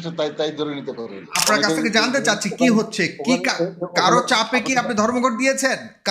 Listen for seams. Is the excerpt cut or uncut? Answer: cut